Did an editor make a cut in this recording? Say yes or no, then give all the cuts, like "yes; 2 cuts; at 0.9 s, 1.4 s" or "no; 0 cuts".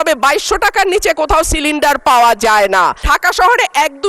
yes; 1 cut; at 3.1 s